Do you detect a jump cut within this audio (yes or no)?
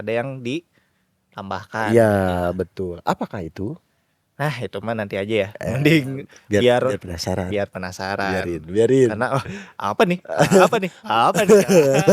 no